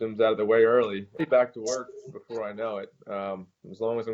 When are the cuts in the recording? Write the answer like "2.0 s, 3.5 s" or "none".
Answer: 1.0 s